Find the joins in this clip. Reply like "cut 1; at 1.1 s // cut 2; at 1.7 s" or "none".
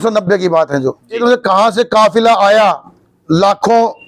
cut 1; at 1.2 s